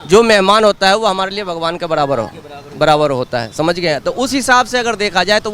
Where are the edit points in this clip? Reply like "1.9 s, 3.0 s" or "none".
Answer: none

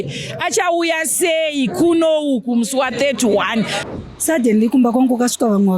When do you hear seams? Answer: 3.8 s

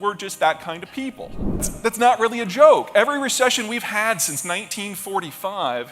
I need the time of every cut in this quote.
1.7 s

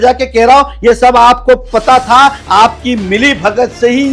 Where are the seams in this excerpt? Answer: none

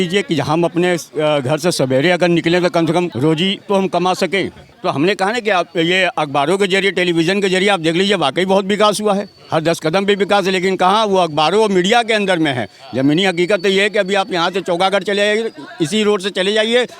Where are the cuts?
3.1 s, 4.6 s

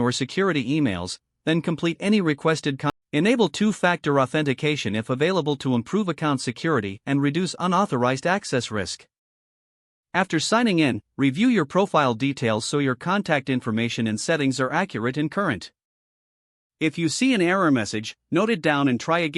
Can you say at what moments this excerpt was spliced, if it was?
2.9 s

